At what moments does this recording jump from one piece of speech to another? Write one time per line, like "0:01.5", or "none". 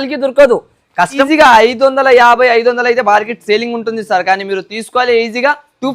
0:01.2